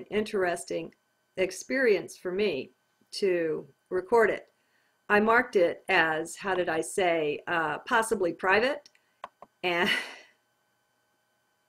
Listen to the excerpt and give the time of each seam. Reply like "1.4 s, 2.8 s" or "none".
6.5 s